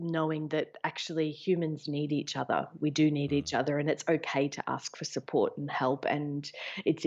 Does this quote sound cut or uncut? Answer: uncut